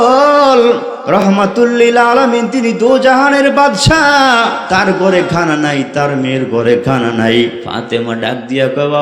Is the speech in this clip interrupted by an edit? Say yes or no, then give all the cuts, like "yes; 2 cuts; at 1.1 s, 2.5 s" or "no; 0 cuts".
yes; 3 cuts; at 1.2 s, 4.6 s, 7.7 s